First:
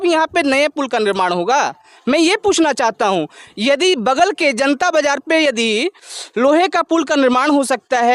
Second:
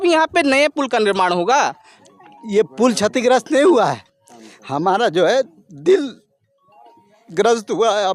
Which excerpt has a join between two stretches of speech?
second; 1 cut; at 1.9 s

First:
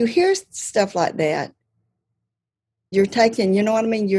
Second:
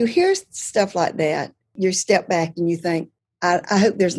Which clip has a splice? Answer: second; 2 cuts; at 1.7 s, 3.2 s

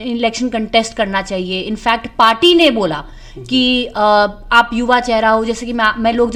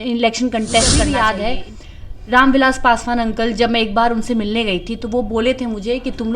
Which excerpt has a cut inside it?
second; 1 cut; at 0.9 s

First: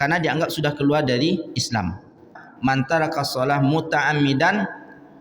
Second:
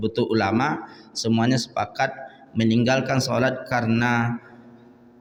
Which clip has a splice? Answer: first; 1 cut; at 2.3 s

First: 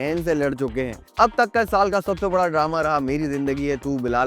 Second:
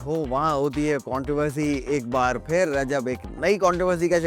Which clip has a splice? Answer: first; 1 cut; at 1.0 s

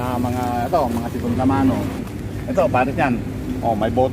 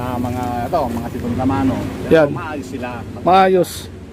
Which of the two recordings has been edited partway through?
first; 1 cut; at 2.0 s

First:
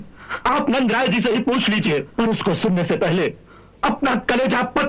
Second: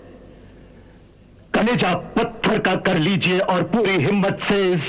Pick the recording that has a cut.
first; 1 cut; at 2.1 s

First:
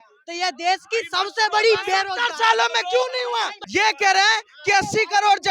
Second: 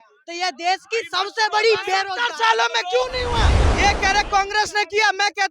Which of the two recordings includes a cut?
second; 1 cut; at 3.6 s

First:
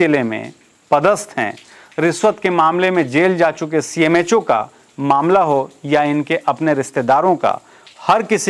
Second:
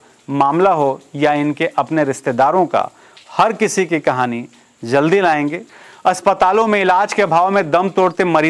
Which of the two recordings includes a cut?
second; 1 cut; at 5.6 s

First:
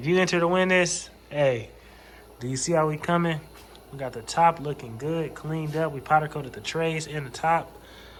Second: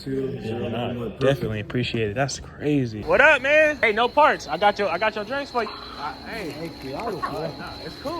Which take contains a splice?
second; 3 cuts; at 3.0 s, 3.8 s, 5.7 s

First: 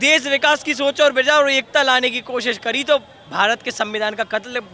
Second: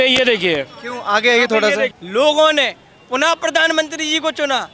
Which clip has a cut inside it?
second; 1 cut; at 2.0 s

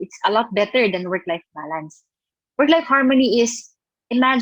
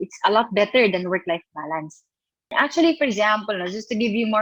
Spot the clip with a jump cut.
second; 1 cut; at 2.5 s

